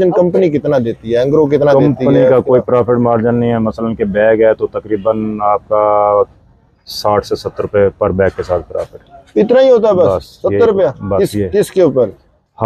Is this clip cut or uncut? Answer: uncut